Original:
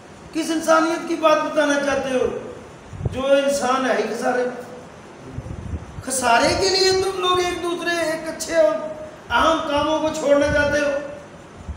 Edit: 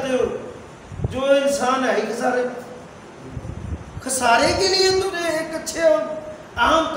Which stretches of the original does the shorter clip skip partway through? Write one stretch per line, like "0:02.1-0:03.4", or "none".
0:07.2-0:07.9